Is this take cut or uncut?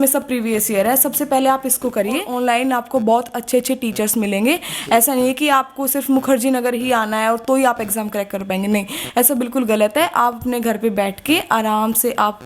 cut